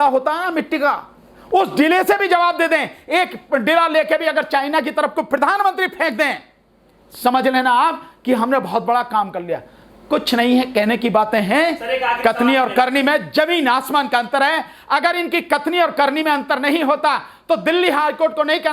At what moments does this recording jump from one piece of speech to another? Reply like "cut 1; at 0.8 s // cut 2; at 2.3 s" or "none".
none